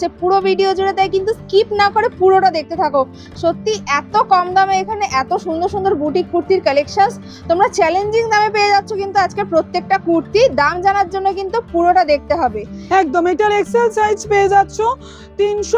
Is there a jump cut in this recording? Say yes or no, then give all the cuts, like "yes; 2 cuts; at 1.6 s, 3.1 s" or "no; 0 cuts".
no; 0 cuts